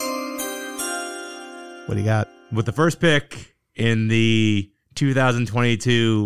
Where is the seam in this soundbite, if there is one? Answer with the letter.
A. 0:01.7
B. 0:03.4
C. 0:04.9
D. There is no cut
A